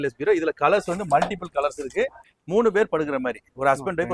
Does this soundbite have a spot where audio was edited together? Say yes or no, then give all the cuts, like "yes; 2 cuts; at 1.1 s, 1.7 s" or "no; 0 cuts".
yes; 1 cut; at 2.2 s